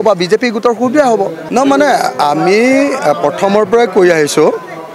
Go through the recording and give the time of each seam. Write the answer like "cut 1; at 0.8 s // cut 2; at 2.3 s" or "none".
cut 1; at 1.4 s